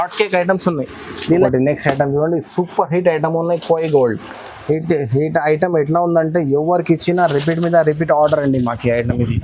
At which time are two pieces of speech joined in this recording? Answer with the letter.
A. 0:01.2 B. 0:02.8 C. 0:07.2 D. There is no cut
A